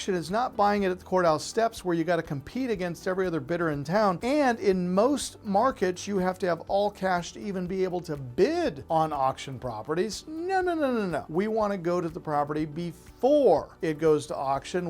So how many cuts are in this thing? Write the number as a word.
four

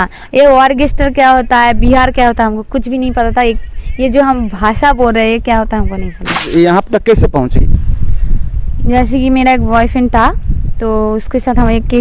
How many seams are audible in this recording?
one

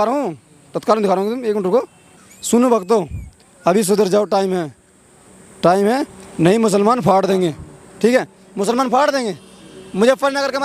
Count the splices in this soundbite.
zero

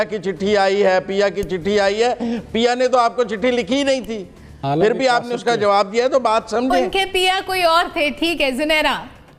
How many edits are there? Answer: zero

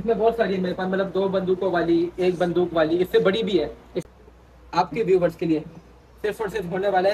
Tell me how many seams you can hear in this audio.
one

